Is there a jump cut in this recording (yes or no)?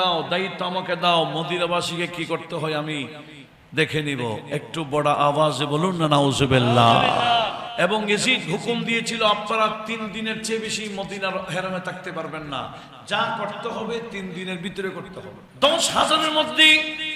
yes